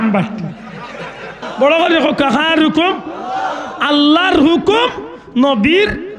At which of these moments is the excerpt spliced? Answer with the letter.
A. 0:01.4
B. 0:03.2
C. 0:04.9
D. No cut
A